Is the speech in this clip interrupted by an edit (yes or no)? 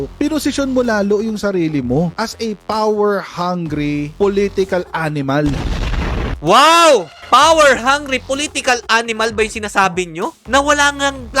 yes